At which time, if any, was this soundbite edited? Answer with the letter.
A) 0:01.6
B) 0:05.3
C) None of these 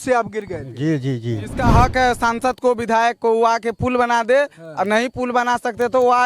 A